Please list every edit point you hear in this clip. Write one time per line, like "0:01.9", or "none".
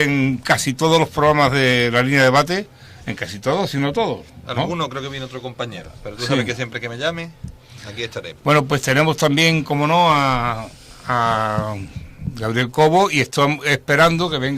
0:01.5